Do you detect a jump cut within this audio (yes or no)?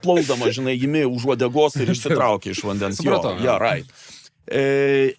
no